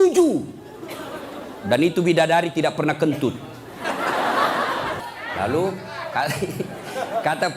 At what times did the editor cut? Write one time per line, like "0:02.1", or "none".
0:05.0